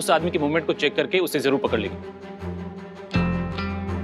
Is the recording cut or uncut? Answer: uncut